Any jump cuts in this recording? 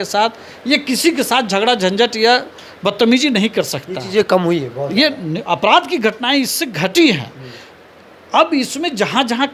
no; 0 cuts

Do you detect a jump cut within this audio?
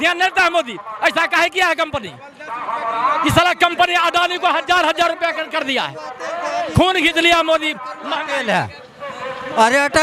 no; 0 cuts

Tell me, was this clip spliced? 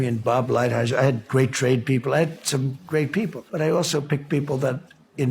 yes; 1 cut; at 3.4 s

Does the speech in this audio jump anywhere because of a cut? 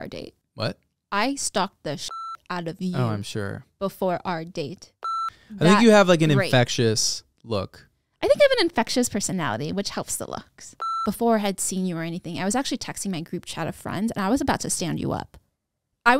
yes; 2 cuts; at 4.9 s, 11.0 s

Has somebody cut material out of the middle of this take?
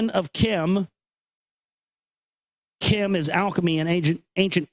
no; 0 cuts

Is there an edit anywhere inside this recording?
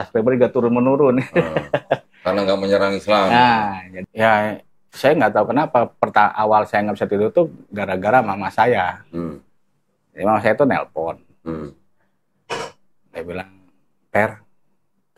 yes; 1 cut; at 3.9 s

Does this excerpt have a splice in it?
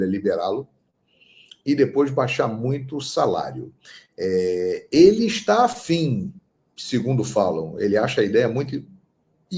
no; 0 cuts

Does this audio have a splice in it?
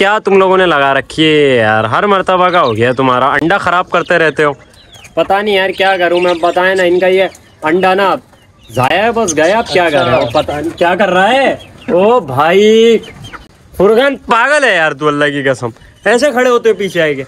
no; 0 cuts

